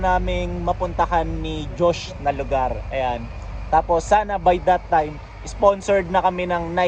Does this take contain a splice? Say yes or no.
no